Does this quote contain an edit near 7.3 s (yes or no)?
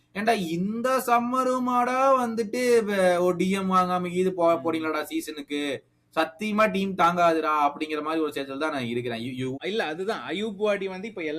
no